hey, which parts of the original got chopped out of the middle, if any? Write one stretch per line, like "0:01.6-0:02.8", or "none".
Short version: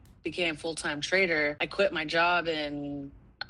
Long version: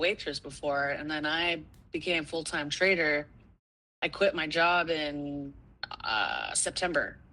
0:03.3-0:04.1